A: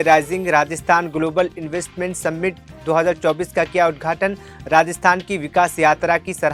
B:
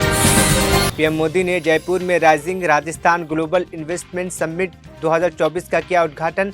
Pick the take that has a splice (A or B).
B